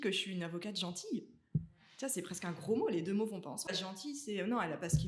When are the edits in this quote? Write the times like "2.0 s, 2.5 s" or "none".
3.7 s